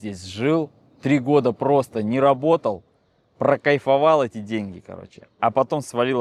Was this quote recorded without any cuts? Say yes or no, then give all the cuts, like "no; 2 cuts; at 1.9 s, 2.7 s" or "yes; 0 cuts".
yes; 0 cuts